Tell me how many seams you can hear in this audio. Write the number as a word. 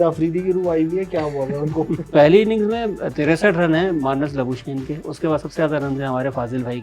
one